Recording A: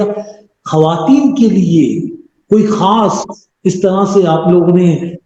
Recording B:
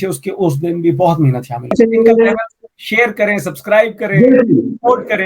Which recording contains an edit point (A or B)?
B